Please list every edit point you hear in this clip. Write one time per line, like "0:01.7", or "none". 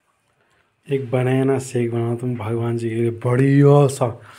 none

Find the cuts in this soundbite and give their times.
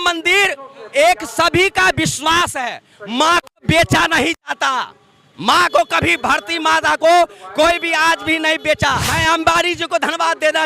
0:09.1

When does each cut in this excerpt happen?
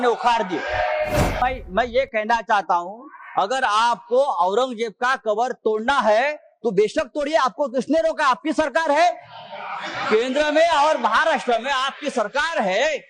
0:01.4

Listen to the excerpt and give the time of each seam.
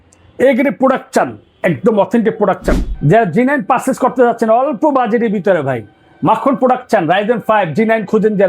0:02.9

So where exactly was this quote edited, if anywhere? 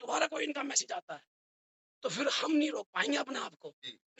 none

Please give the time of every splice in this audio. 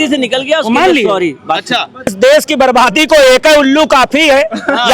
0:02.1

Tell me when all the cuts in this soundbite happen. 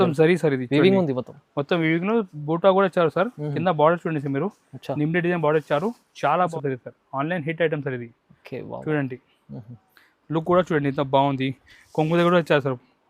0:06.5

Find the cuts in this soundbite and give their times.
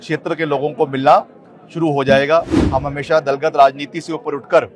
0:02.6

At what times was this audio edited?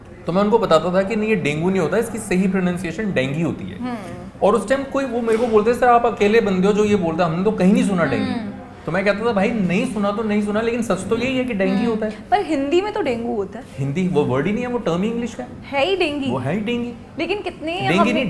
none

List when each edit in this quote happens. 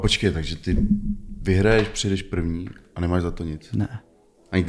none

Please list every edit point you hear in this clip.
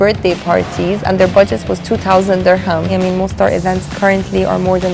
0:02.9

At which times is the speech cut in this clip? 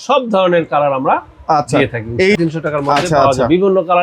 0:02.4

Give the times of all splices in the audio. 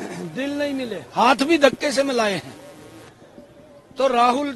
none

